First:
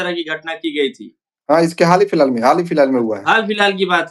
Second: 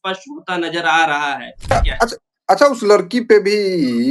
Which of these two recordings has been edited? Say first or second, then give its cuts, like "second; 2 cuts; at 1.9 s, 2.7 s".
second; 1 cut; at 1.7 s